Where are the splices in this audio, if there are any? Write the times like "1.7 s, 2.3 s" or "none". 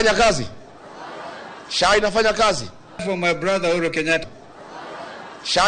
3.0 s, 4.2 s